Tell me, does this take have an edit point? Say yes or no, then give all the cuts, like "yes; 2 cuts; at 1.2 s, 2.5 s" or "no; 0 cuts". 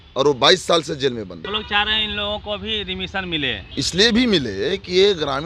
yes; 2 cuts; at 1.6 s, 3.6 s